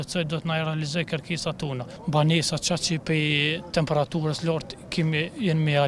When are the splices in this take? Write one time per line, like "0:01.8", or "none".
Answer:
0:01.9